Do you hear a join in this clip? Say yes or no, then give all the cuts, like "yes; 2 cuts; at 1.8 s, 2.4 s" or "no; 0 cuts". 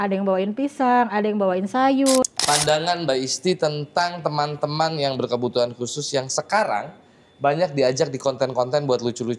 yes; 1 cut; at 2.3 s